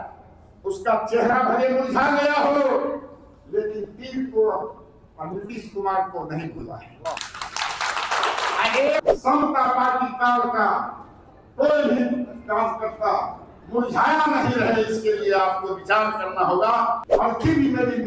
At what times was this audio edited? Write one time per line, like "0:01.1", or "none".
0:09.0
0:17.1